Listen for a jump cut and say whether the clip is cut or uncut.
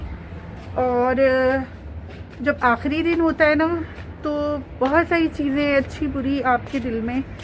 uncut